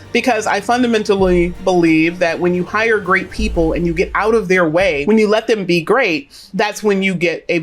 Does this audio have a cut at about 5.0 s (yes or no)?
yes